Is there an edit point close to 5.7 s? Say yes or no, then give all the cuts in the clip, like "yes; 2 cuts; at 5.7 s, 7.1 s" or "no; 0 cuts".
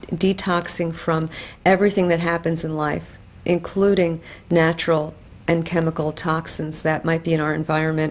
yes; 1 cut; at 5.7 s